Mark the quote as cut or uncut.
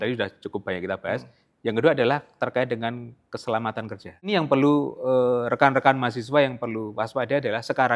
cut